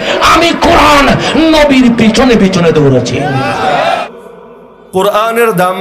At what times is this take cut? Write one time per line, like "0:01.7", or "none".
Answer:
0:04.0